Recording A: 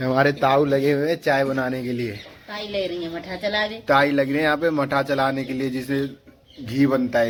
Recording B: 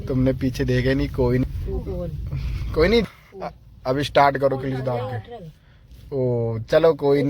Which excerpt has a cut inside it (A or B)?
B